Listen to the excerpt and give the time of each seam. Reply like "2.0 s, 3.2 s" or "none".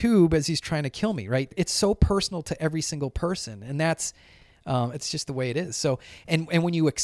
1.5 s, 5.0 s